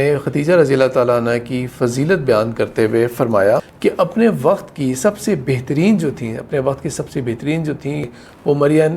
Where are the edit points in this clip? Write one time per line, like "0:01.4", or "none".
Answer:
0:03.7
0:08.0